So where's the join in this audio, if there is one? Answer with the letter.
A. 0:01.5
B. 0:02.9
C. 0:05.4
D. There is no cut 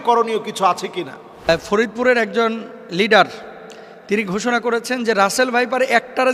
A